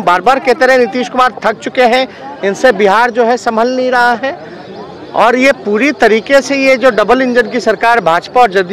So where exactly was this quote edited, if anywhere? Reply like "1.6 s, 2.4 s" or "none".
none